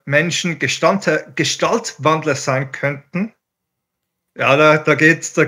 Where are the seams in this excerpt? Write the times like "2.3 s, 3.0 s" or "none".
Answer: none